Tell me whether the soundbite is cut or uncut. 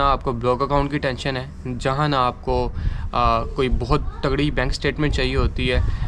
uncut